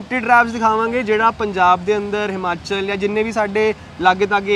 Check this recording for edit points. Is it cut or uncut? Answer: uncut